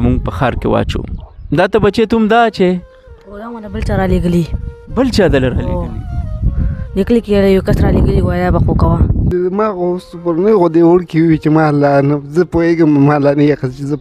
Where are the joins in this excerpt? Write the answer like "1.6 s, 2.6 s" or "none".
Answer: 9.3 s